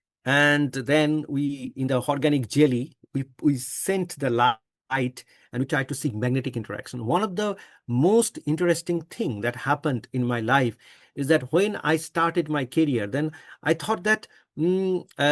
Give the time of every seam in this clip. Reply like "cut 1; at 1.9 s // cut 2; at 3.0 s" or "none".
none